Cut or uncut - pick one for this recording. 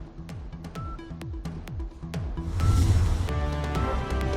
uncut